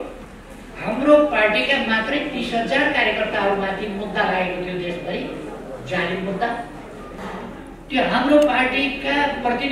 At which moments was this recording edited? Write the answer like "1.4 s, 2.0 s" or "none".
7.2 s